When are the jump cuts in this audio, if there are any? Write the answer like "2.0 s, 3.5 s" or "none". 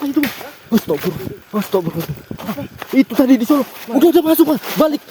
none